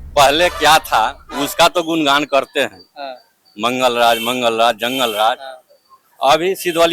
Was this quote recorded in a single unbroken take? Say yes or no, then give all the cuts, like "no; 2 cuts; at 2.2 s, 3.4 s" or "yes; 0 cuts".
yes; 0 cuts